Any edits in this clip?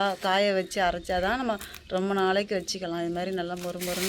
no; 0 cuts

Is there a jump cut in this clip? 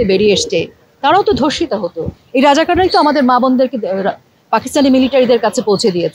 no; 0 cuts

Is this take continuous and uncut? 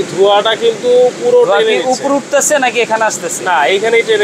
yes; 0 cuts

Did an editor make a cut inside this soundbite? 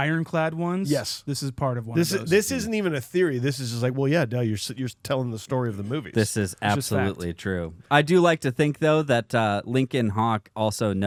no; 0 cuts

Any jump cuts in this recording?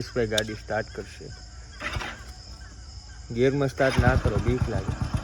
no; 0 cuts

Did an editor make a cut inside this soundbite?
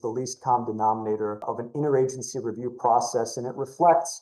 yes; 1 cut; at 1.4 s

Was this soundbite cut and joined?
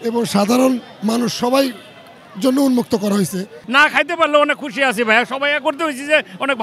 yes; 1 cut; at 3.5 s

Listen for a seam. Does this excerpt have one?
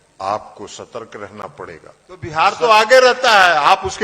yes; 1 cut; at 2.3 s

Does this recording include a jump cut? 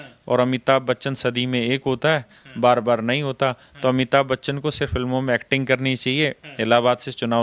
no; 0 cuts

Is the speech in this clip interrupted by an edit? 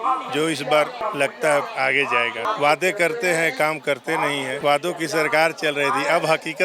yes; 3 cuts; at 1.0 s, 2.4 s, 4.6 s

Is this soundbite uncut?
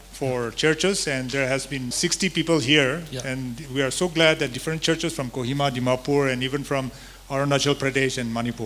yes; 0 cuts

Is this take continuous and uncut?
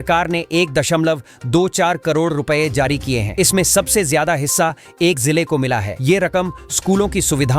yes; 0 cuts

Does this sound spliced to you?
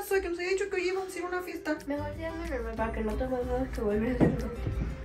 no; 0 cuts

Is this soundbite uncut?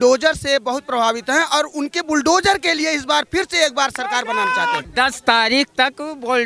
no; 1 cut; at 4.9 s

